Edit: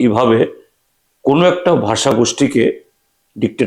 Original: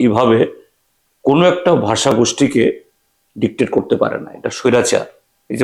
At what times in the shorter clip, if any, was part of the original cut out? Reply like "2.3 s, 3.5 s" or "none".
none